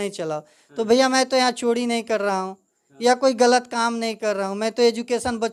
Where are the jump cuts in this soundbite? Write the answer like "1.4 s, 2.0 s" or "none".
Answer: none